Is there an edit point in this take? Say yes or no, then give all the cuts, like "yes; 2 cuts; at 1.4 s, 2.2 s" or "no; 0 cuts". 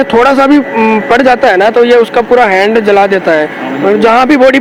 no; 0 cuts